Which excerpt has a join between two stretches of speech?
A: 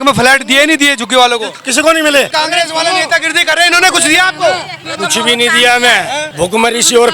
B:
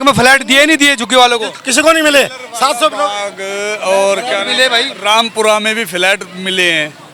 A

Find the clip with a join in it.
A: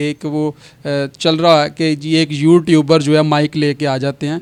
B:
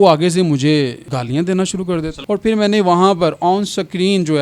B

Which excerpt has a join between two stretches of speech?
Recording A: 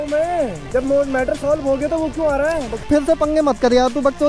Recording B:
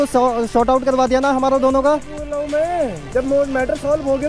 A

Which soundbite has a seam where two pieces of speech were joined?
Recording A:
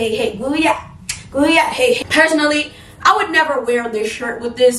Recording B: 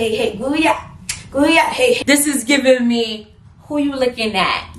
B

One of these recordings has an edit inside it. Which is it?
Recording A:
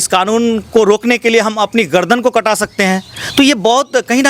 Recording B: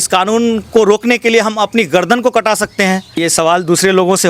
B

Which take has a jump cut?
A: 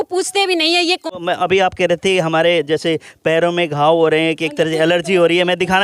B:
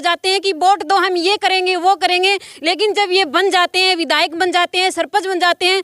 A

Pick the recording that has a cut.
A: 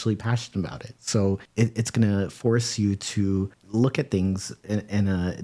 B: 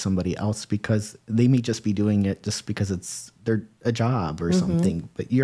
A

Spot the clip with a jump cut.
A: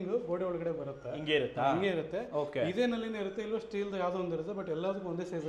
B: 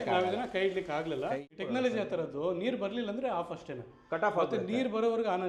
B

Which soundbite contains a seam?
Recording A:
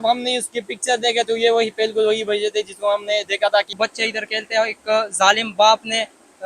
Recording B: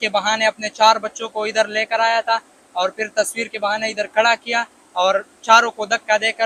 A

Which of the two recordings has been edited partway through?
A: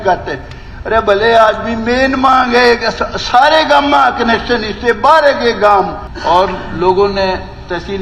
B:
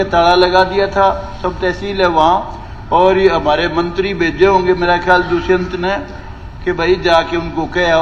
A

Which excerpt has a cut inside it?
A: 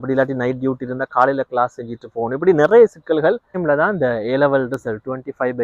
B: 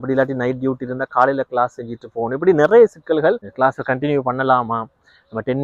A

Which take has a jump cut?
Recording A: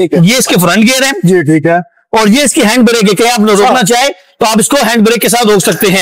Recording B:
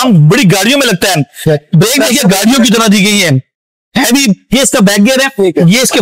B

